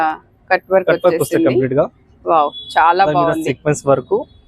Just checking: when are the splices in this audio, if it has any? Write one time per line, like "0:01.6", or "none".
none